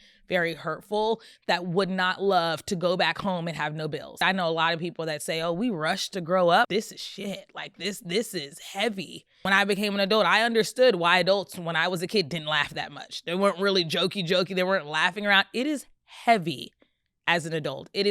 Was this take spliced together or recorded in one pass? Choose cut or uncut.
cut